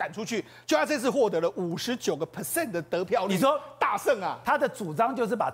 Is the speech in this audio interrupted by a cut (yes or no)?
no